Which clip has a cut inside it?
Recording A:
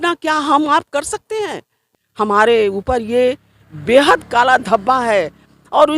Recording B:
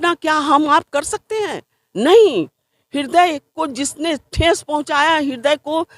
A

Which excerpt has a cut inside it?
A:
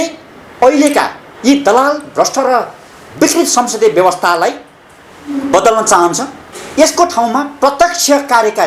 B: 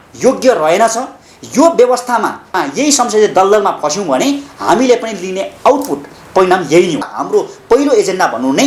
B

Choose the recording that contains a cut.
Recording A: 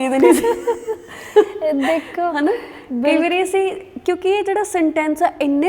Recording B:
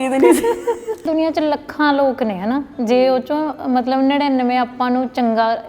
B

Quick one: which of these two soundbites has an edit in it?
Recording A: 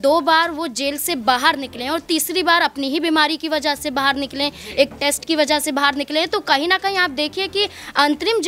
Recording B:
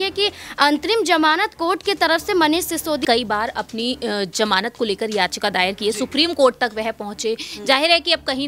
B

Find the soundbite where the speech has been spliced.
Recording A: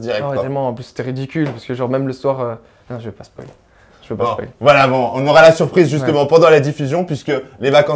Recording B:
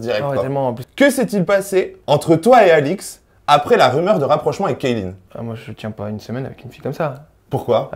B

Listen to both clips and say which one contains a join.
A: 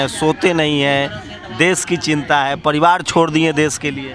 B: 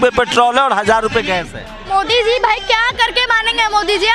B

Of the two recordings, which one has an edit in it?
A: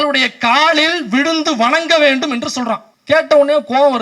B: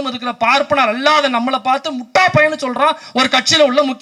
A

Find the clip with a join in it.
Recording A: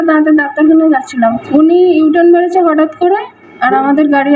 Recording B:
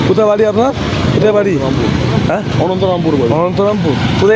A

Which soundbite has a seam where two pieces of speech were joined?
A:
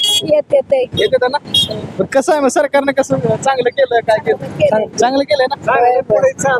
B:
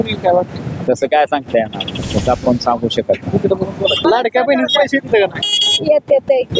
B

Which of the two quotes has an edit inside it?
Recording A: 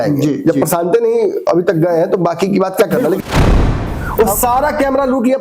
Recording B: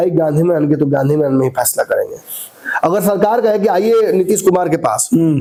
A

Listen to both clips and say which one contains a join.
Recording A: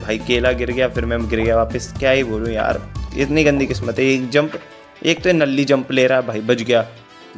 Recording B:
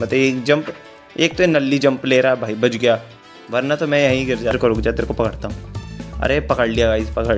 B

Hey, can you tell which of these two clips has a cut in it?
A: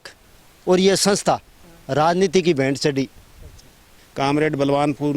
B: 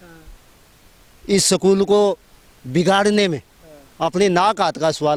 A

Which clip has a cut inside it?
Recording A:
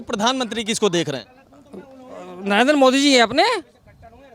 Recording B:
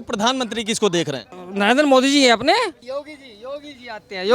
B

